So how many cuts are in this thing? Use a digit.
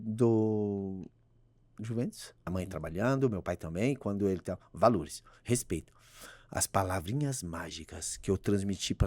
1